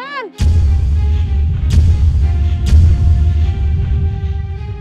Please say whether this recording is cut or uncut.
uncut